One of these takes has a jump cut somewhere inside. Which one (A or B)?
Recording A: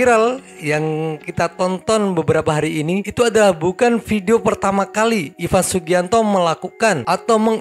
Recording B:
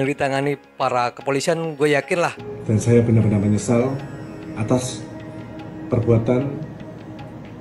B